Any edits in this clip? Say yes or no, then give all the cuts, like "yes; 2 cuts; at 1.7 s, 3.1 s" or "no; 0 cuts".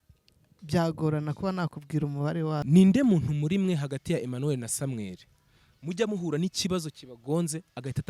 yes; 1 cut; at 2.6 s